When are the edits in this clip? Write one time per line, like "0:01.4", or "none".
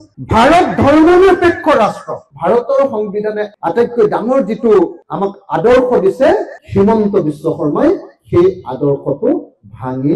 0:02.3
0:03.5

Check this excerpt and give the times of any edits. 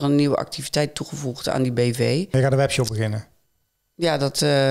0:02.3

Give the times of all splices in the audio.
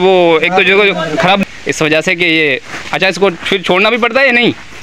0:01.4

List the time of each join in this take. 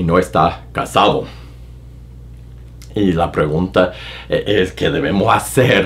none

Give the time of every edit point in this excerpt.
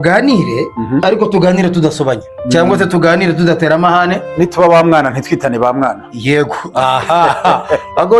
0:01.0
0:02.3

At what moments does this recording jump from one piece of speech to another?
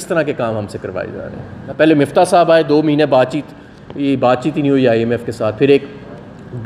0:01.6

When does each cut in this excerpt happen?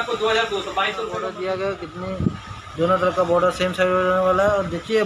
0:01.3

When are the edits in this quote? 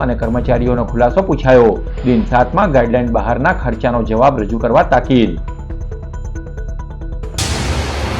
0:07.2

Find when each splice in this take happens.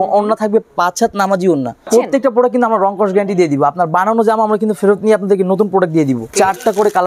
0:01.9
0:06.3

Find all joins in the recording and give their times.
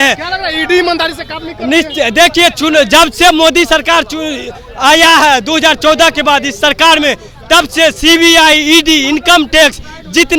none

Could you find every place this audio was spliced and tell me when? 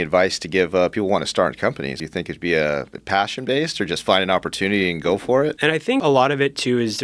0:02.0
0:05.7

